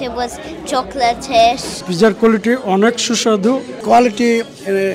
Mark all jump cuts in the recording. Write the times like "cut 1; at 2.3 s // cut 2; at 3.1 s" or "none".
cut 1; at 1.9 s // cut 2; at 3.7 s